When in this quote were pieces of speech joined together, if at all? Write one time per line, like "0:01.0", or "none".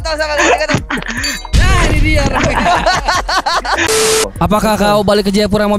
0:04.1